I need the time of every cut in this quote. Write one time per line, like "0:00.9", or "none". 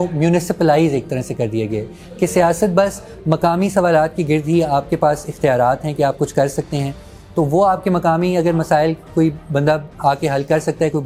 none